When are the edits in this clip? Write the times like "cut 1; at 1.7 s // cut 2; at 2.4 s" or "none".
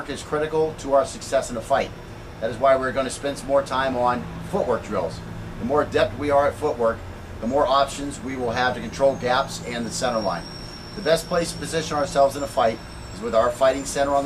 cut 1; at 4.9 s